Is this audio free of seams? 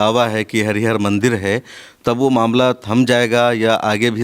yes; 0 cuts

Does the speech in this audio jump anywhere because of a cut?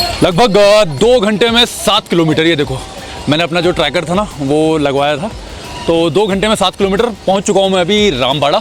no; 0 cuts

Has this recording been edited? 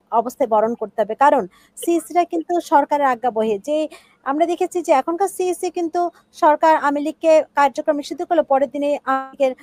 no; 0 cuts

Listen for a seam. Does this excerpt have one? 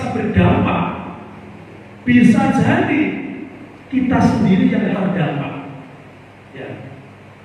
yes; 1 cut; at 4.9 s

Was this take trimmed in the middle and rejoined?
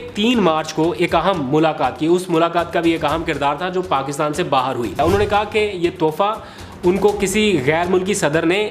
yes; 1 cut; at 5.0 s

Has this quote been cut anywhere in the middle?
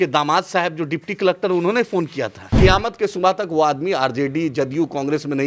yes; 1 cut; at 2.5 s

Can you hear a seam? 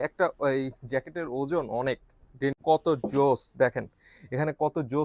yes; 1 cut; at 2.6 s

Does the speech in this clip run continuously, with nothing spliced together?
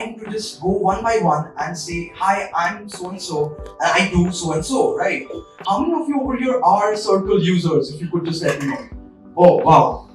no; 1 cut; at 5.5 s

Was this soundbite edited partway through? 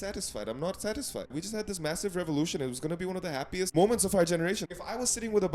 yes; 3 cuts; at 1.3 s, 3.7 s, 4.7 s

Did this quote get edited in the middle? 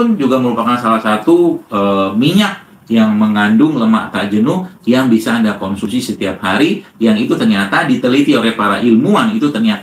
no; 0 cuts

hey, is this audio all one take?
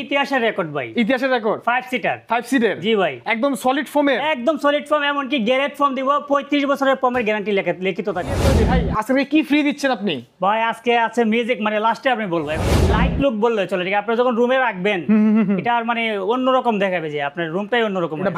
no; 2 cuts; at 8.5 s, 12.8 s

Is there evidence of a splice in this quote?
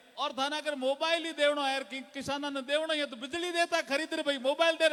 no; 0 cuts

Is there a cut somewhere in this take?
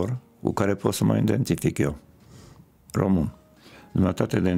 no; 0 cuts

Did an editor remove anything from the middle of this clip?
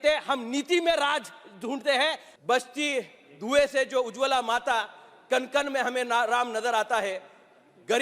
yes; 1 cut; at 2.3 s

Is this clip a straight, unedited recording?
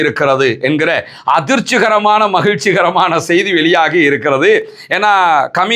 yes; 0 cuts

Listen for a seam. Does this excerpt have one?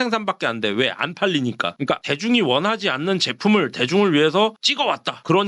yes; 1 cut; at 2.0 s

